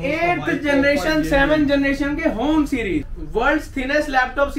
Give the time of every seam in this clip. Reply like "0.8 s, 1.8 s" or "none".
3.2 s